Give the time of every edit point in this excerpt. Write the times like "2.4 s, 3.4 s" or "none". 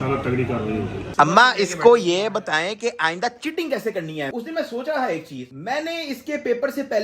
1.1 s